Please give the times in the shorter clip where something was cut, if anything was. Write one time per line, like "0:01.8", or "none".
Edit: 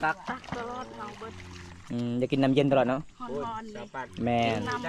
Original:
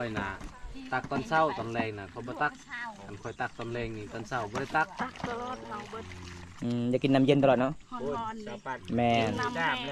none